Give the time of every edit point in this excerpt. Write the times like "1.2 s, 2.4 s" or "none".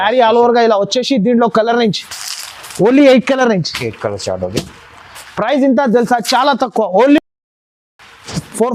none